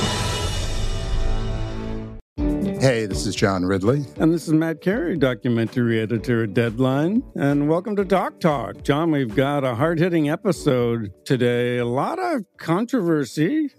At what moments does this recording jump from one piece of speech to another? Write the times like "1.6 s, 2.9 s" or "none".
2.2 s

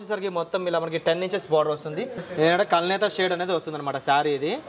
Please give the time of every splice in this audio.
2.2 s

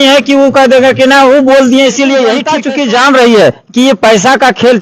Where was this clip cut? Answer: 2.5 s

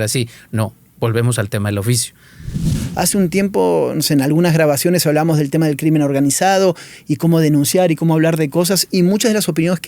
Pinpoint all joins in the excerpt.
2.8 s

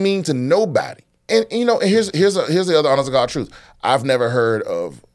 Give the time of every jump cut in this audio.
1.3 s

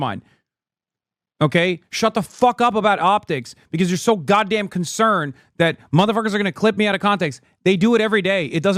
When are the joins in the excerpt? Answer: none

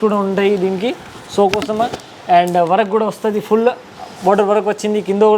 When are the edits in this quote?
none

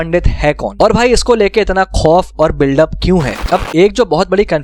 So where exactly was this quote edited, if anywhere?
3.4 s

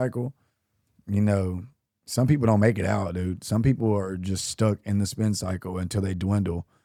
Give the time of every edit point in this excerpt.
none

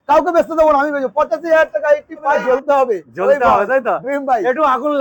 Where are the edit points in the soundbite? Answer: 2.4 s

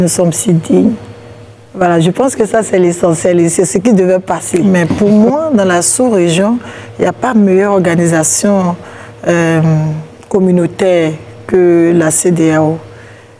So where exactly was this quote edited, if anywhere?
4.6 s

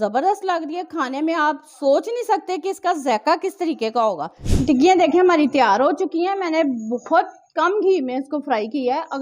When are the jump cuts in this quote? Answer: 4.4 s

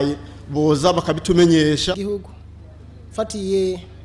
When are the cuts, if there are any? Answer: 2.0 s

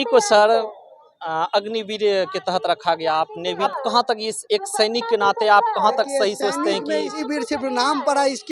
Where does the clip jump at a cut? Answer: 3.7 s, 7.2 s

